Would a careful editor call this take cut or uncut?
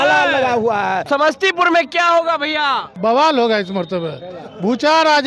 cut